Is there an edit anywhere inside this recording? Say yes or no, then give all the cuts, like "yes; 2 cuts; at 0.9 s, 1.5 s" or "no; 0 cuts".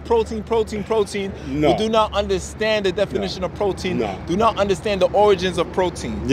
no; 0 cuts